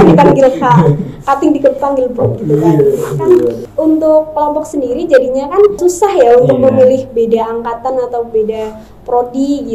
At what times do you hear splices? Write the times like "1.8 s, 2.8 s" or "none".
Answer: 3.6 s, 5.8 s